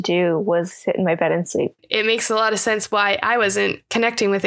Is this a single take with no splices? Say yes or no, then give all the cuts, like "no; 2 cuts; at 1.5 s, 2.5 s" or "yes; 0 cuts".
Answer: no; 1 cut; at 1.8 s